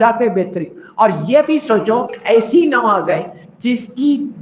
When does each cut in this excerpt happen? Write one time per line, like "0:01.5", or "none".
0:02.2